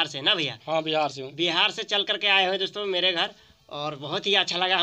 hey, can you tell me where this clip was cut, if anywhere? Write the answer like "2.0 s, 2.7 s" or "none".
none